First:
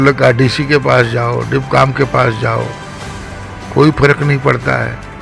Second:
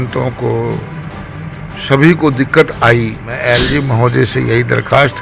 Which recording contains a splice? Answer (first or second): second